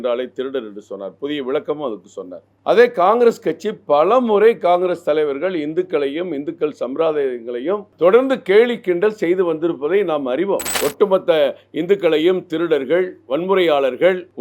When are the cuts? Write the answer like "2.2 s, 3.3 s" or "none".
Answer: 10.7 s